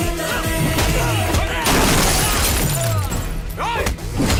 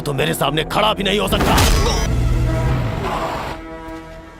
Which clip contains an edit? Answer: second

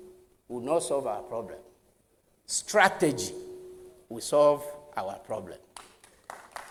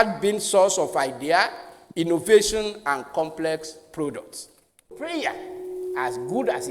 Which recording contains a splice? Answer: second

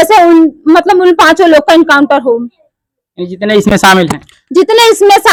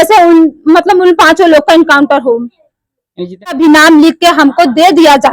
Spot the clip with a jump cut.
second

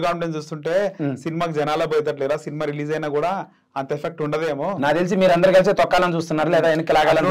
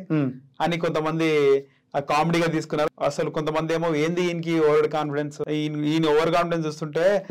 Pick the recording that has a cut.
second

